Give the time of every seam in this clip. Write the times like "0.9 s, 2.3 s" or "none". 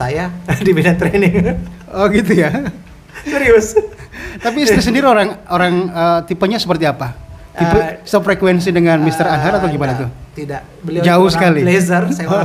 none